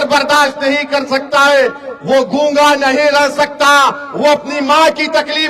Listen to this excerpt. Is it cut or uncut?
uncut